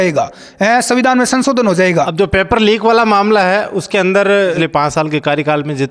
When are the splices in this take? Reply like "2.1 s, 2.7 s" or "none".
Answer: 2.1 s, 4.6 s